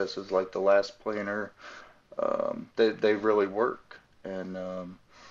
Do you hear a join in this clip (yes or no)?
no